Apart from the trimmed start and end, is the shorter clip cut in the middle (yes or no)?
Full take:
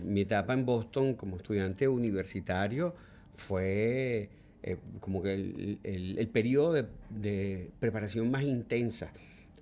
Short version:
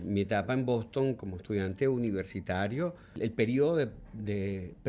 yes